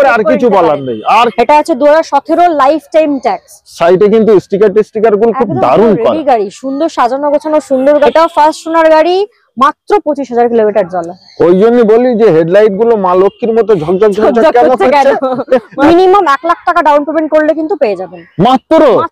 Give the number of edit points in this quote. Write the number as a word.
three